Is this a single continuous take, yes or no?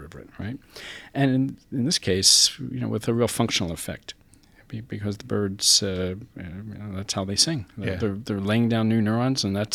yes